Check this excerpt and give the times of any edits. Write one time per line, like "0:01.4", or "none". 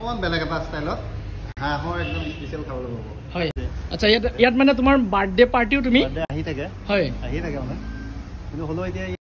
0:03.5

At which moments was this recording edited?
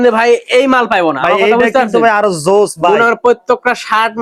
none

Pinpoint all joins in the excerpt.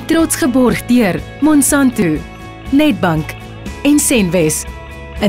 0:02.0

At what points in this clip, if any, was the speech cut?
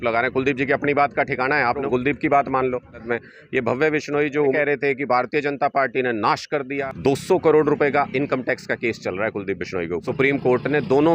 0:01.8
0:03.0
0:04.5
0:06.8
0:10.1

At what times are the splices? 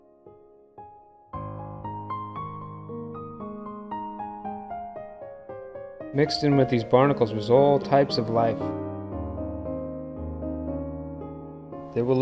none

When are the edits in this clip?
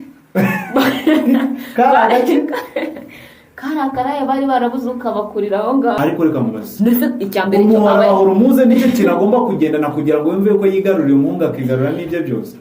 0:06.0

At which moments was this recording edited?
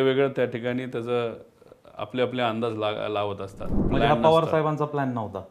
0:03.7

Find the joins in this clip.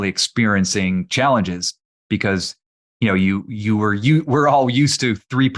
none

